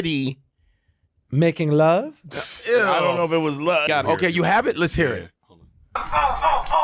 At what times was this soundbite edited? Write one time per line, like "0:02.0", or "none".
none